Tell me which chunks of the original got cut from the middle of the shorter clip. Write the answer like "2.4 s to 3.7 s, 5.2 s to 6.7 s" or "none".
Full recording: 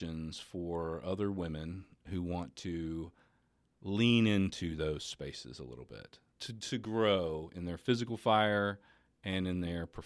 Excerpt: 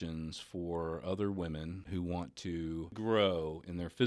1.8 s to 2.0 s, 3.2 s to 6.8 s